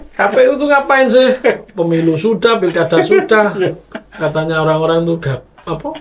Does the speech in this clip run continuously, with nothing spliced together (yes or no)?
yes